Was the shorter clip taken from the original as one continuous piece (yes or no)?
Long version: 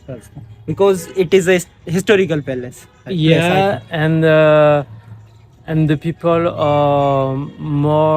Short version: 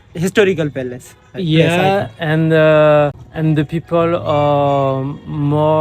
no